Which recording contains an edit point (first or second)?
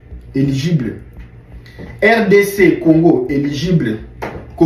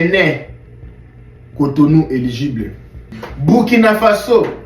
second